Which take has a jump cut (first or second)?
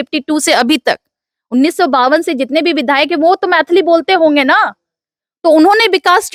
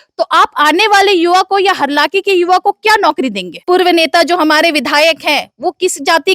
second